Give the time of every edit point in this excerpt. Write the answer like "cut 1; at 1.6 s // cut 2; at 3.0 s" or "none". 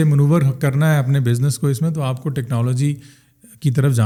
none